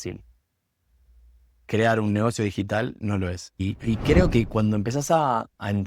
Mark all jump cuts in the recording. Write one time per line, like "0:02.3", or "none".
0:03.7